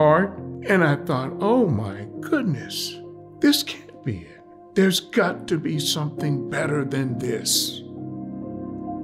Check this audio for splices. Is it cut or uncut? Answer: cut